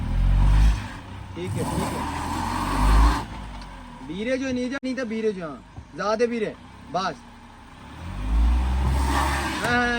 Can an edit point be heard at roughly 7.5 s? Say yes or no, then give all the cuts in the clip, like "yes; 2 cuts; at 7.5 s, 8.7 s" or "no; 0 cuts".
no; 1 cut; at 4.8 s